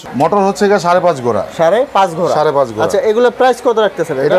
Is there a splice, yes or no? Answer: no